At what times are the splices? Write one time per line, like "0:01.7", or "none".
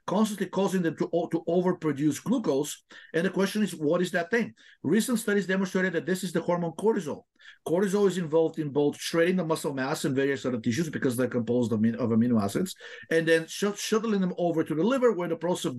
none